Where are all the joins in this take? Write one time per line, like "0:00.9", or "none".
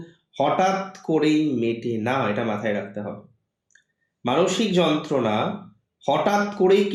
none